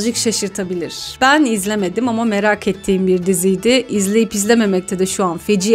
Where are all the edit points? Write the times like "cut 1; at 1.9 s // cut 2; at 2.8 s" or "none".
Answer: none